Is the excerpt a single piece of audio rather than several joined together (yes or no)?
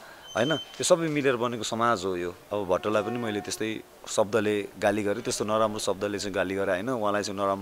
no